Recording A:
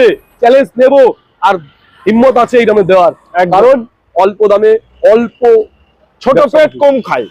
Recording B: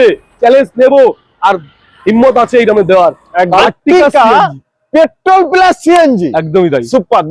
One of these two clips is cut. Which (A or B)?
B